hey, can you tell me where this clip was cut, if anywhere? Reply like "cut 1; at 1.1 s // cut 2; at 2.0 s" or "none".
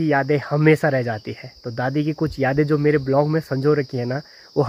none